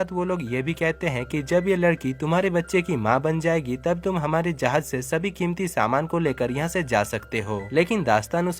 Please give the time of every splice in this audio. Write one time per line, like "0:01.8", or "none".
0:07.6